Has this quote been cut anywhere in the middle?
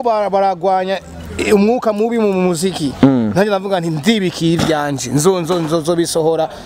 no; 0 cuts

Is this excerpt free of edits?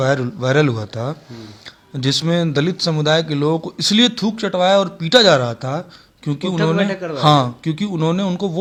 yes; 0 cuts

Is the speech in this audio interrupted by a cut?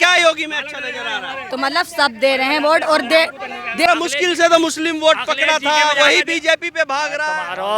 yes; 1 cut; at 3.9 s

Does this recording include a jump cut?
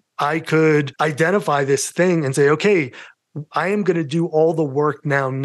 yes; 1 cut; at 0.9 s

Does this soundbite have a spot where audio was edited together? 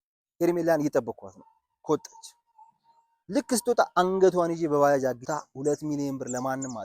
yes; 1 cut; at 5.2 s

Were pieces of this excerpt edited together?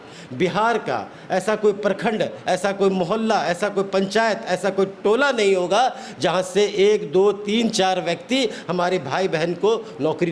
no; 0 cuts

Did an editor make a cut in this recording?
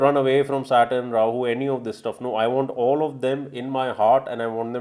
no; 0 cuts

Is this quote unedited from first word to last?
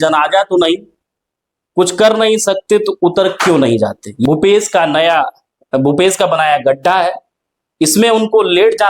no; 1 cut; at 4.2 s

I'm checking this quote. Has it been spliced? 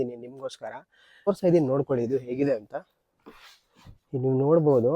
yes; 1 cut; at 1.3 s

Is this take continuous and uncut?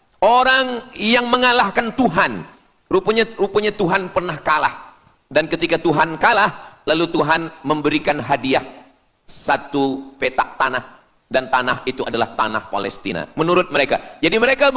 yes; 0 cuts

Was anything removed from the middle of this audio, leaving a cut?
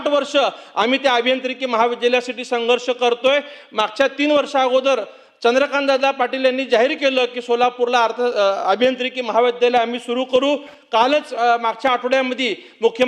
no; 0 cuts

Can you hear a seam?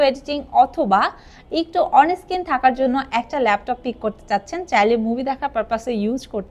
no; 0 cuts

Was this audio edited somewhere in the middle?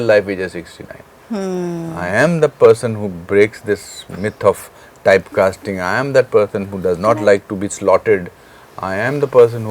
no; 0 cuts

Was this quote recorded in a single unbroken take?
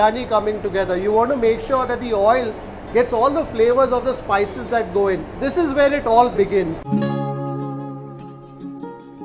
no; 2 cuts; at 5.4 s, 6.8 s

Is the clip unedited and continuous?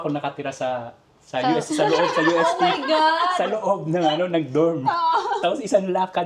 yes; 0 cuts

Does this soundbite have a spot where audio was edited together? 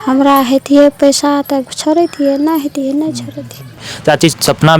yes; 1 cut; at 3.9 s

